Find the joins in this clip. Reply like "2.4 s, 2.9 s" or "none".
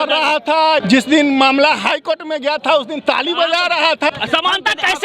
0.8 s, 4.1 s